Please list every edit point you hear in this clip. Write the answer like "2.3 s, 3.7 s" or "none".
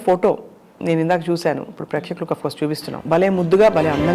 2.9 s